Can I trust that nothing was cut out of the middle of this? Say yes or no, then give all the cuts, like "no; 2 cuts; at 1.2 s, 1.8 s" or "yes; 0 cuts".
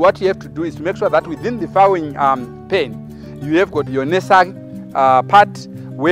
no; 1 cut; at 3.9 s